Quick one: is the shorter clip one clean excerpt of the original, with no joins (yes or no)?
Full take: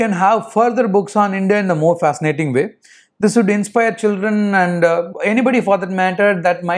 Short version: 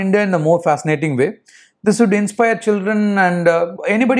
yes